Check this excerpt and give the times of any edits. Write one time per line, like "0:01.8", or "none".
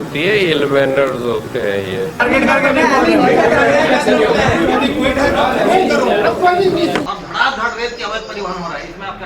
0:02.2
0:07.1